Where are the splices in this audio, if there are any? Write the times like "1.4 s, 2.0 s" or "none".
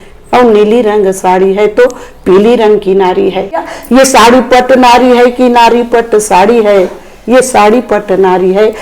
3.7 s